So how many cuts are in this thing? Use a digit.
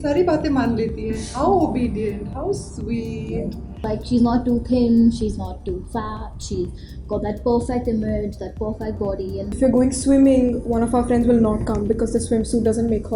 2